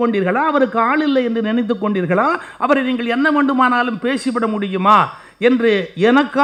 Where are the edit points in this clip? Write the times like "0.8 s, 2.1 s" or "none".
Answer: none